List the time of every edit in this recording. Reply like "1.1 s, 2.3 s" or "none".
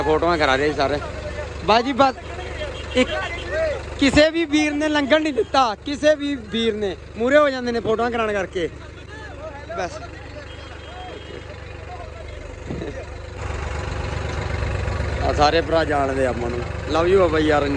13.4 s